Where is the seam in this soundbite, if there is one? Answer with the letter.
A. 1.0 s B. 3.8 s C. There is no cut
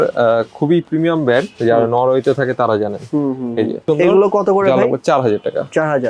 B